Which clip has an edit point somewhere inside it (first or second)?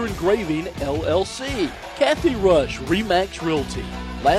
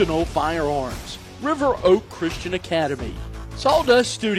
first